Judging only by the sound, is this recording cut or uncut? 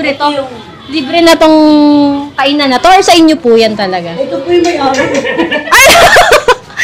uncut